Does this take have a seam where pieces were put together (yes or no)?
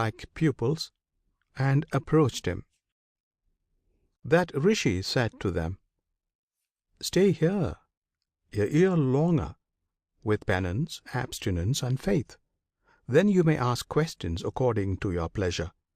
no